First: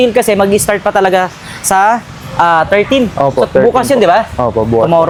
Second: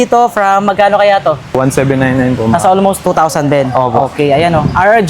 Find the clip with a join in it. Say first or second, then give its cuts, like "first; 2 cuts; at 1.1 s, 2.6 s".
second; 2 cuts; at 1.5 s, 3.0 s